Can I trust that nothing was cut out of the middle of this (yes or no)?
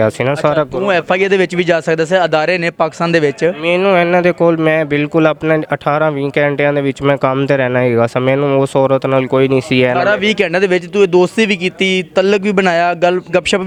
yes